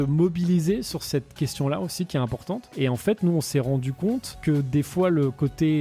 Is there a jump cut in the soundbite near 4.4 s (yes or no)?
yes